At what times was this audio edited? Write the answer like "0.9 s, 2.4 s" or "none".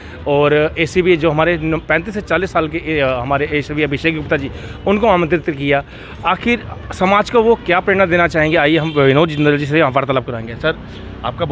none